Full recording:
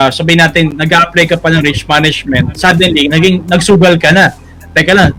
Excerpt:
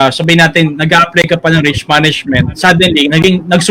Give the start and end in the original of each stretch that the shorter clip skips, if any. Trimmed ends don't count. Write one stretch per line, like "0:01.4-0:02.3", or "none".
none